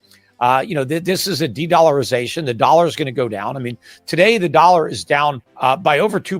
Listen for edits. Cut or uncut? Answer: cut